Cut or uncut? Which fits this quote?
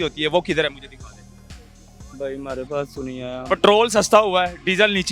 uncut